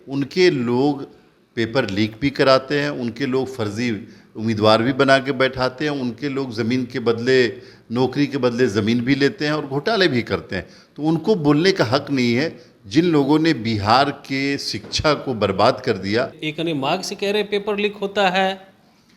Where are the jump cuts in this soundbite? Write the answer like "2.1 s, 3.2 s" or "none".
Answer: 16.4 s